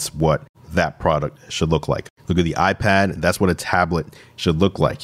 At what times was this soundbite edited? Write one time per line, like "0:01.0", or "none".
none